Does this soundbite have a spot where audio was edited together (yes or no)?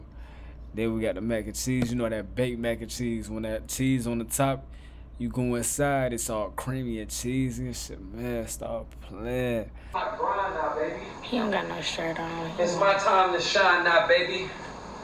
yes